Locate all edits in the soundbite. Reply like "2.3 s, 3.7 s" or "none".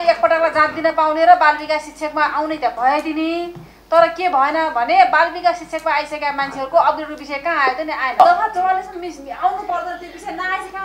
8.2 s

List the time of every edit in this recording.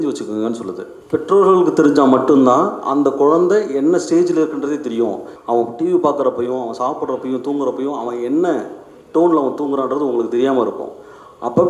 0.9 s, 5.3 s

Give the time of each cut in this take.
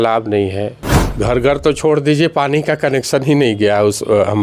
1.0 s

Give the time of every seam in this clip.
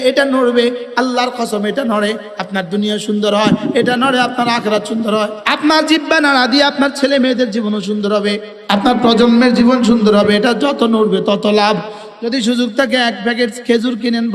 5.4 s, 8.5 s, 12.0 s

